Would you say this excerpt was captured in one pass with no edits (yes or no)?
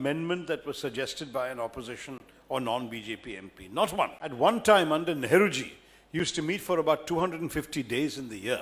no